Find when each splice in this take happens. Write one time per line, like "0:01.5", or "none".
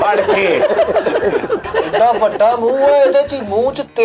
0:01.7

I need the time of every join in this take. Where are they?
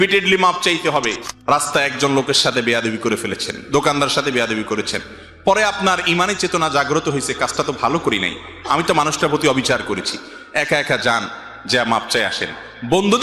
0:01.3

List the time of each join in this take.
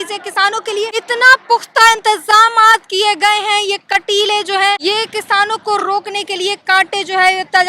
0:01.0
0:04.8

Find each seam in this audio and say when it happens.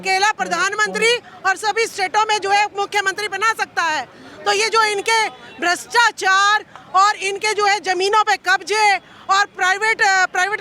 none

